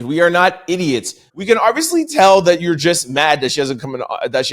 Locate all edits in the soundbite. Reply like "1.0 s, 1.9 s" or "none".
1.3 s